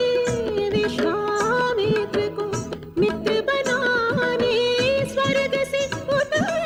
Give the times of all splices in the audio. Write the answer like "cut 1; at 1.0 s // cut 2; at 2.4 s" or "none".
none